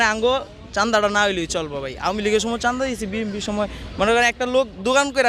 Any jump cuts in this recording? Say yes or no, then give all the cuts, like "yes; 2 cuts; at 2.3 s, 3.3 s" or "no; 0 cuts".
no; 0 cuts